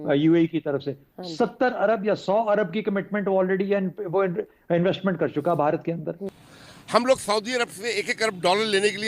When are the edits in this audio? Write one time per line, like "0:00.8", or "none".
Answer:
0:06.3